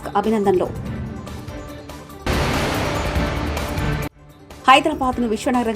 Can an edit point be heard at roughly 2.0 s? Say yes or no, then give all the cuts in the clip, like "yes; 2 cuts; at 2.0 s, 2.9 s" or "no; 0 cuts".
no; 0 cuts